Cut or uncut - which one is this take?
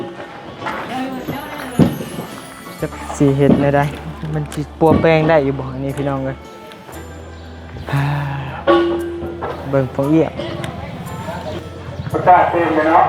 cut